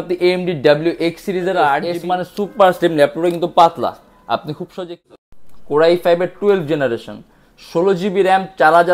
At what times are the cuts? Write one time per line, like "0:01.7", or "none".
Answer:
0:01.9
0:05.0